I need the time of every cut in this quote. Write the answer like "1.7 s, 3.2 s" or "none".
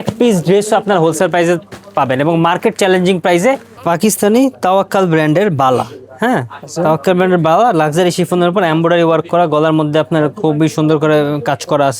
3.7 s